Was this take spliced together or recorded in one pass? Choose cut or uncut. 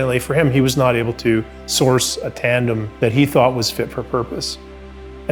cut